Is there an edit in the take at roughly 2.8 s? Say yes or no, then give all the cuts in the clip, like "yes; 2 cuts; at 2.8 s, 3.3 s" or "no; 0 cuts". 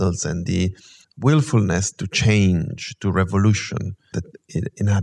no; 2 cuts; at 1.0 s, 4.1 s